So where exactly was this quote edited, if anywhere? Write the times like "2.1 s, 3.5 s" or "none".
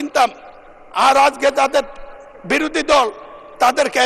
none